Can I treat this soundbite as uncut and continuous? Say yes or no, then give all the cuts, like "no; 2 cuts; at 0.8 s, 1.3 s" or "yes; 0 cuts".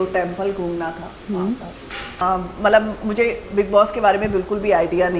no; 1 cut; at 2.2 s